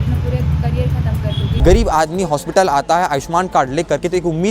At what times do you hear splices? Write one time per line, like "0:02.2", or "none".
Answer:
0:01.5